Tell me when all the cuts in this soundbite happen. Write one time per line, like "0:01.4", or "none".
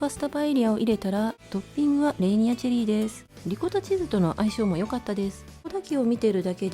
0:01.4
0:03.3
0:05.7